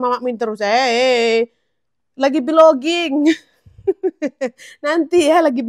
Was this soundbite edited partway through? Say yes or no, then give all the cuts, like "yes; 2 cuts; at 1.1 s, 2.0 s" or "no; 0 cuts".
no; 0 cuts